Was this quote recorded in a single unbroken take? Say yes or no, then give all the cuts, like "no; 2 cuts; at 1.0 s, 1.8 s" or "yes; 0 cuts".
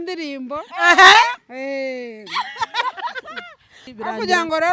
no; 1 cut; at 3.8 s